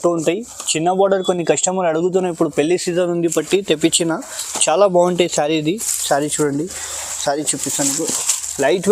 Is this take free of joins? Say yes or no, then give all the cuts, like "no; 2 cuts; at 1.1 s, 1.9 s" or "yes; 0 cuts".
yes; 0 cuts